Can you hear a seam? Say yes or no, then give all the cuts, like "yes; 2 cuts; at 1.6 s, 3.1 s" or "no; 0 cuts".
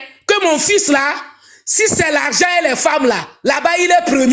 no; 0 cuts